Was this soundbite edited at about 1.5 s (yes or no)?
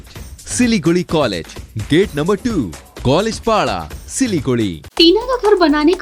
no